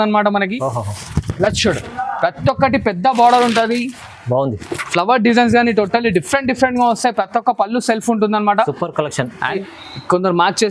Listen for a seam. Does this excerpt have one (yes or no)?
yes